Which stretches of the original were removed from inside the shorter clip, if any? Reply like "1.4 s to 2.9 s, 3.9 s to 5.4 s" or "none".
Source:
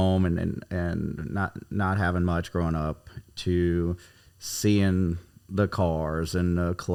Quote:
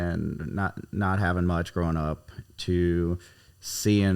none